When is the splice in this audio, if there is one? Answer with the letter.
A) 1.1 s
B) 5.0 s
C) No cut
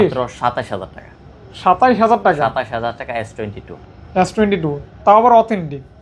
C